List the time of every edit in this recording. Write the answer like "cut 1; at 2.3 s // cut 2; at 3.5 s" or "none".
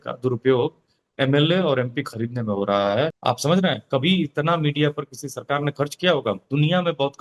cut 1; at 3.2 s